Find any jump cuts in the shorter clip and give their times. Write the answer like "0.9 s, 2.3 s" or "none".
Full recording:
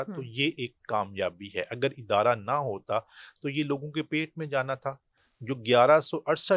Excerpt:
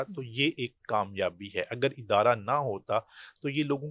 none